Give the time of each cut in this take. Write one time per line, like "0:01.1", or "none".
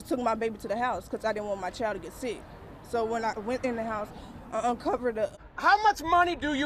0:05.4